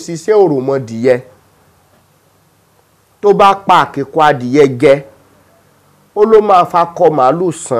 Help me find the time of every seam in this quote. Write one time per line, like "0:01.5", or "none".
none